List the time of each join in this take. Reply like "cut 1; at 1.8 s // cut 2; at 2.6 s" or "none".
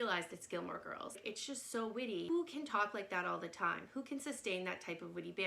cut 1; at 1.2 s // cut 2; at 2.3 s